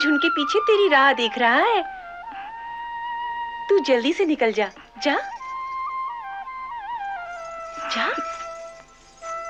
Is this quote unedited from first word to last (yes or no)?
yes